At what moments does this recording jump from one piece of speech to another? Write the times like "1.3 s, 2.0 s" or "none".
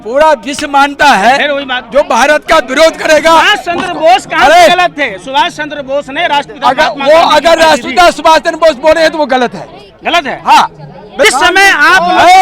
11.2 s